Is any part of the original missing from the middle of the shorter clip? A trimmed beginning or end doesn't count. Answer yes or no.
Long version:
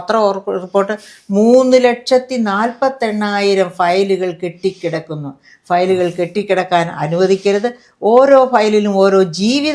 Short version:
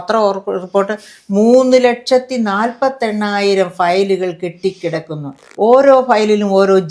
yes